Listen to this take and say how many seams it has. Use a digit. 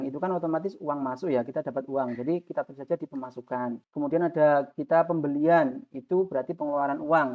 1